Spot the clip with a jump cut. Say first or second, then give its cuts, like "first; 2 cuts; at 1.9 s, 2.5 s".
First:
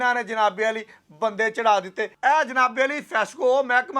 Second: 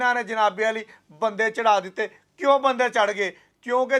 first; 1 cut; at 2.1 s